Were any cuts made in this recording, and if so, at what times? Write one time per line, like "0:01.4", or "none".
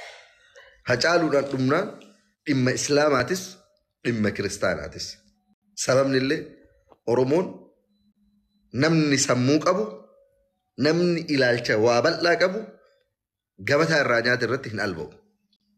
none

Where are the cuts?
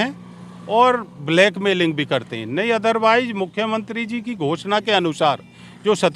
none

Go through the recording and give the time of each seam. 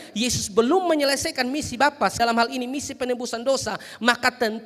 0:02.1

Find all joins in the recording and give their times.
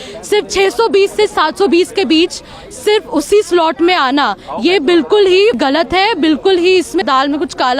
0:05.6
0:07.0

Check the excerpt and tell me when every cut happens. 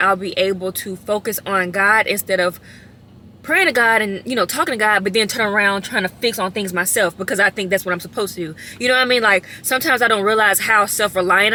none

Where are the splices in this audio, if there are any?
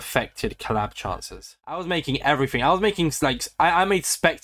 0:01.5

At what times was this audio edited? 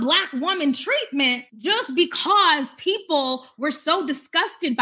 none

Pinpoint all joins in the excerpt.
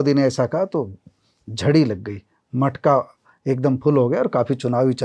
none

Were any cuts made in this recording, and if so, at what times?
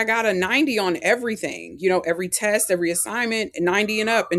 none

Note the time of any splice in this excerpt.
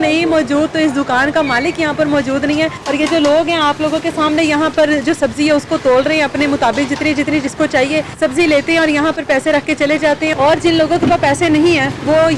0:02.8
0:08.1
0:10.3

